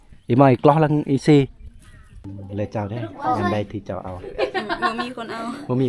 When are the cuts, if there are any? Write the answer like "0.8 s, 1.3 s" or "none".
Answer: 2.2 s